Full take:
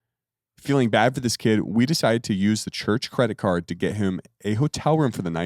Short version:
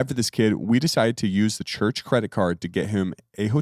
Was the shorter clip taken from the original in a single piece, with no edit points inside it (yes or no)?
yes